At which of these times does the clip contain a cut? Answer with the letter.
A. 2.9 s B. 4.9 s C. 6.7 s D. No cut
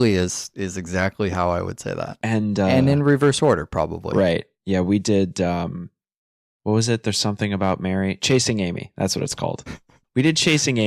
C